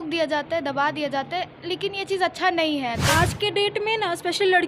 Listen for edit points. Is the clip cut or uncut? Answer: cut